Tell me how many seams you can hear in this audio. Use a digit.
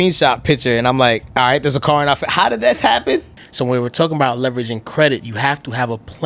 2